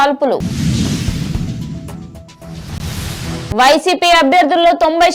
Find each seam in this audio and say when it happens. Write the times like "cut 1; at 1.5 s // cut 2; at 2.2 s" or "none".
cut 1; at 0.9 s // cut 2; at 2.8 s